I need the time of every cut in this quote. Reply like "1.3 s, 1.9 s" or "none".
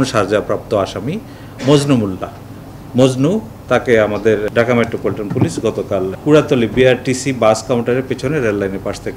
4.5 s, 6.2 s